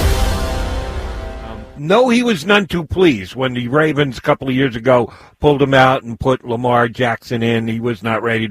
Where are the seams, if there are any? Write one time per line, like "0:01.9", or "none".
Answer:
0:01.7